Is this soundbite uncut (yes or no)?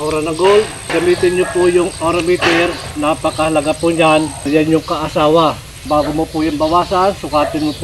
no